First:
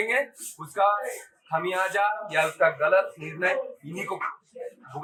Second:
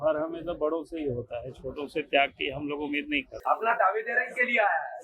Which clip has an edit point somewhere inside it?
second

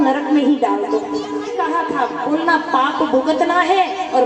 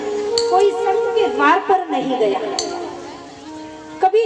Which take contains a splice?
first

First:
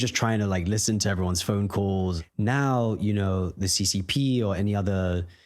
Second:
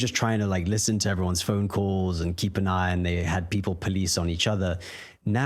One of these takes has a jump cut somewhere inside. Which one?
first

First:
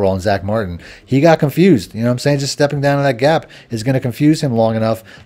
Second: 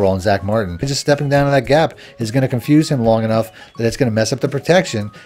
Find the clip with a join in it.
second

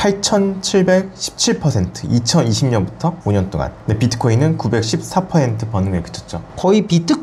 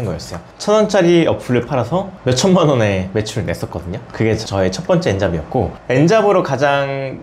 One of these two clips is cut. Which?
second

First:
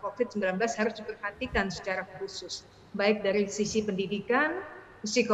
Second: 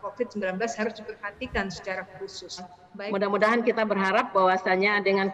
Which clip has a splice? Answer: second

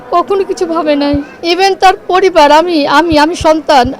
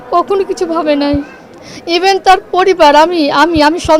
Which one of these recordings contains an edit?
first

